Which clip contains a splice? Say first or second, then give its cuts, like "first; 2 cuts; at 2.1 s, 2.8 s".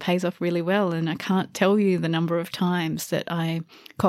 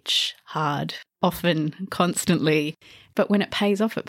second; 2 cuts; at 1.1 s, 2.8 s